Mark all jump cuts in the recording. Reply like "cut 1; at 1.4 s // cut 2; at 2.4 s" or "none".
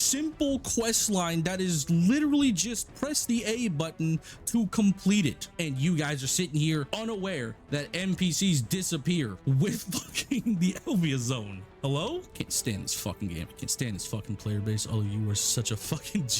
cut 1; at 5.4 s // cut 2; at 12.3 s